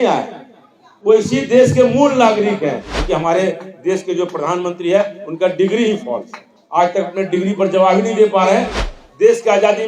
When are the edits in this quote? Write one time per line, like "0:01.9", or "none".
0:02.9
0:08.8